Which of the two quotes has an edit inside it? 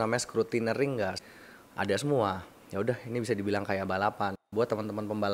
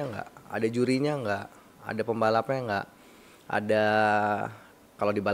first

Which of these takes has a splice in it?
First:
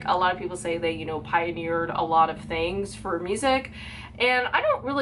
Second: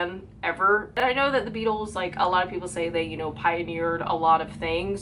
second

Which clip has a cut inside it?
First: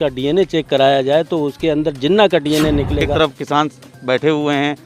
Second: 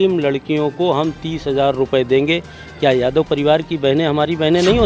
first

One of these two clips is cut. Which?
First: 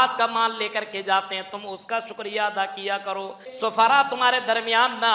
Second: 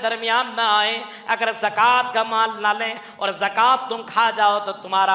first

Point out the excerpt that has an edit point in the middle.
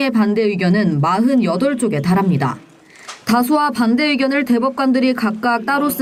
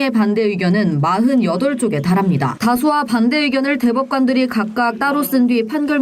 second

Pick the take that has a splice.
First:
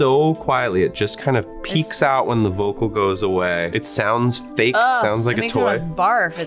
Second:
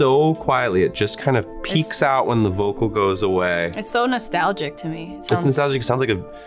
first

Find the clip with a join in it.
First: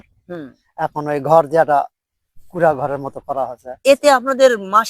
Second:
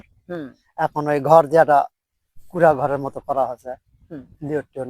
first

